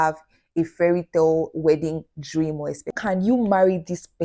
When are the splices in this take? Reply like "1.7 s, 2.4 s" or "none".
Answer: 2.9 s